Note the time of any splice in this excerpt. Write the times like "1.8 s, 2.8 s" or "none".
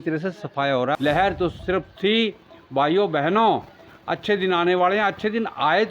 0.9 s